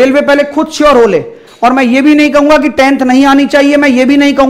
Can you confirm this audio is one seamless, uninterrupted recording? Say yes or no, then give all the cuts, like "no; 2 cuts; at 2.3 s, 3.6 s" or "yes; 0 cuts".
no; 1 cut; at 1.4 s